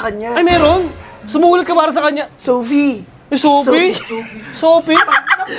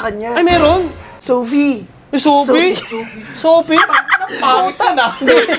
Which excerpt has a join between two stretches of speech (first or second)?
second